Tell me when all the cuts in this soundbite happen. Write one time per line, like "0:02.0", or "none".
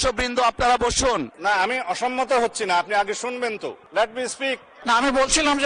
0:01.3
0:03.8
0:04.7